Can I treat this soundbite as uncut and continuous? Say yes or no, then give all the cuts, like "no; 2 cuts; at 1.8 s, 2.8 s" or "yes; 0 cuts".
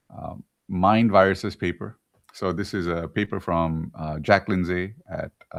yes; 0 cuts